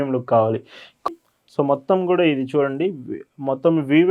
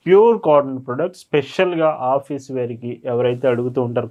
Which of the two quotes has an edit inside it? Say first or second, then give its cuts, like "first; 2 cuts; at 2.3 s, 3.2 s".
first; 1 cut; at 1.0 s